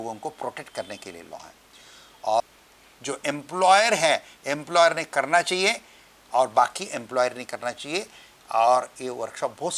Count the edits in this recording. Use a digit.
1